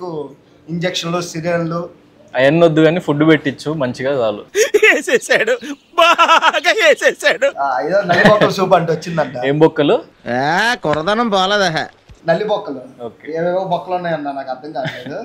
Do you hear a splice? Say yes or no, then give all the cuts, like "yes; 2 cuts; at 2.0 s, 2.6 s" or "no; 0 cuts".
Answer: no; 0 cuts